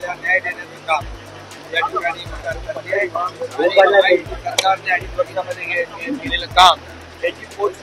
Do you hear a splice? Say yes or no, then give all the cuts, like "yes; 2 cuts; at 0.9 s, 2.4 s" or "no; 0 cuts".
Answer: yes; 1 cut; at 2.3 s